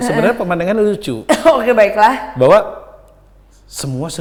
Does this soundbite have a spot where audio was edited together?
no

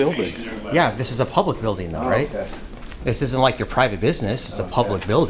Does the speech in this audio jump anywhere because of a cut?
no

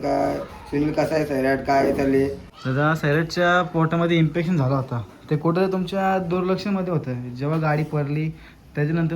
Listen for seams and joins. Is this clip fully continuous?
no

